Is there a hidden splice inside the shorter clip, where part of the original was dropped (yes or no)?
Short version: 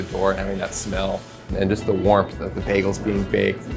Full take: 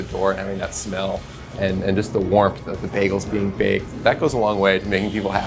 yes